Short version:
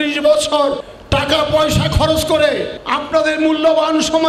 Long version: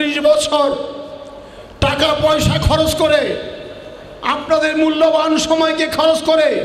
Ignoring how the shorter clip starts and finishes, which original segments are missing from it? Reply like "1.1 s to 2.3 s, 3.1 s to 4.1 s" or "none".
0.8 s to 1.5 s, 3.7 s to 4.4 s

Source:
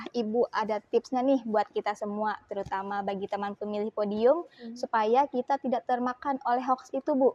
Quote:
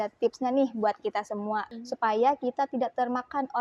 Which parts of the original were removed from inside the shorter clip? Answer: 2.4 s to 4.6 s

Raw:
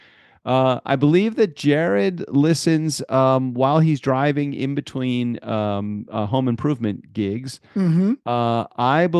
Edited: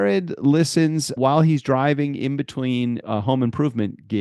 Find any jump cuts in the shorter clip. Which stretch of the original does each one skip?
3.0 s to 3.5 s, 5.4 s to 6.1 s

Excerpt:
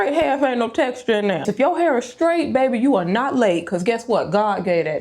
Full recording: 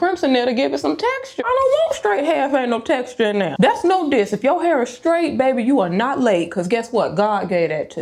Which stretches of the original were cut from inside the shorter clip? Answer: 3.5 s to 4.3 s

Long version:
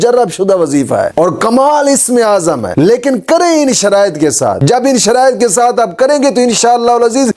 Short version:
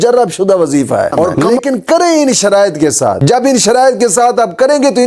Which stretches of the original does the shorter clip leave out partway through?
1.4 s to 2.8 s

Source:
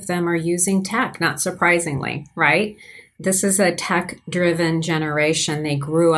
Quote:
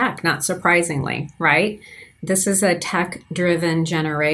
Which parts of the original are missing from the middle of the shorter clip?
none

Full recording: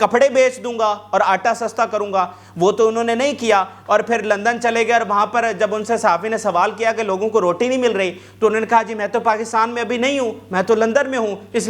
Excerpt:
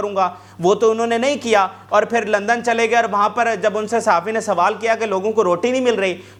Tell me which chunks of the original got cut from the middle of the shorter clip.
none

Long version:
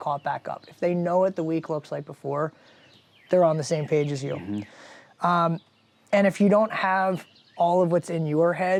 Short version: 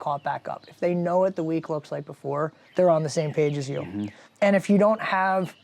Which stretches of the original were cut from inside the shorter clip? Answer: 2.6 s to 3.2 s, 4.7 s to 5.9 s

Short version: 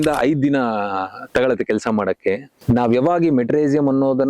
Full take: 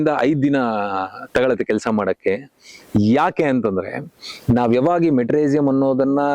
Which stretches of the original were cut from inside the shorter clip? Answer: 2.5 s to 4.3 s

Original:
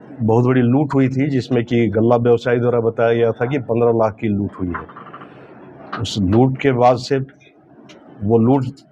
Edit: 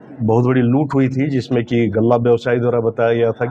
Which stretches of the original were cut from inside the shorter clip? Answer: none

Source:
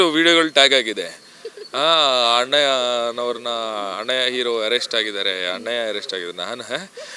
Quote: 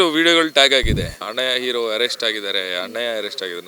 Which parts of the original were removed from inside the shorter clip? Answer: 1.2 s to 3.9 s

